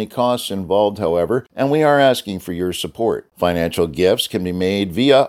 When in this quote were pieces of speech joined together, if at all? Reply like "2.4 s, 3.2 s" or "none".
1.5 s